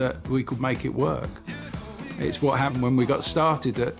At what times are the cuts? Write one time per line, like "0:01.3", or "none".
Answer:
0:02.7